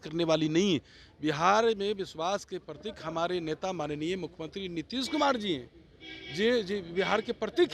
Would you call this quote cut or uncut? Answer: uncut